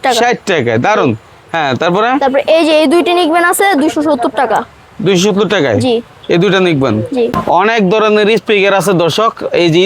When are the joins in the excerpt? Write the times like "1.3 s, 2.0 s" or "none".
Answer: 7.4 s